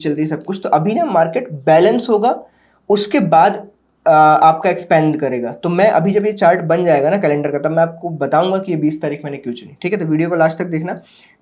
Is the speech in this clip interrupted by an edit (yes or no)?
no